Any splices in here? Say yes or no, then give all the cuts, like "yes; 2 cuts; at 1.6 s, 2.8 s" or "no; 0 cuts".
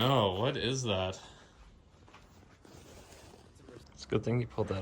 yes; 1 cut; at 3.8 s